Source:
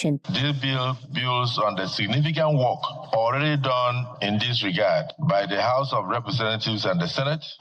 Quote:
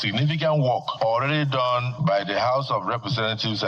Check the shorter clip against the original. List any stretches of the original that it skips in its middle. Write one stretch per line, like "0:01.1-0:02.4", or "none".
0:02.8-0:03.0
0:04.0-0:05.1